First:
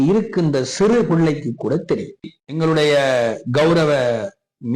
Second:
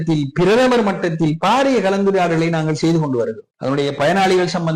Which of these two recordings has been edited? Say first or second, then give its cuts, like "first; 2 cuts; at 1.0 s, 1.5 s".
first; 1 cut; at 2.4 s